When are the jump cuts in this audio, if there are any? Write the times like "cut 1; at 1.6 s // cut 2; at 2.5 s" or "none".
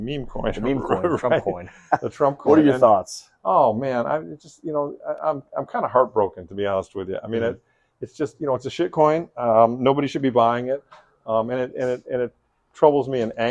none